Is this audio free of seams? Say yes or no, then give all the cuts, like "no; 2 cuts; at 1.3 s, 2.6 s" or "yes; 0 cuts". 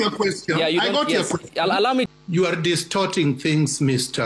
no; 1 cut; at 2.0 s